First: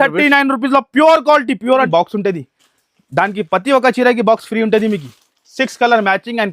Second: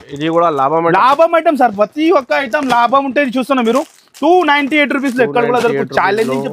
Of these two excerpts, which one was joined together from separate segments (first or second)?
first